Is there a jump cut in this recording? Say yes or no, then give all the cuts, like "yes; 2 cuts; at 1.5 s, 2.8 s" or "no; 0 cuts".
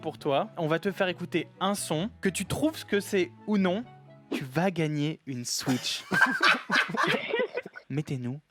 no; 0 cuts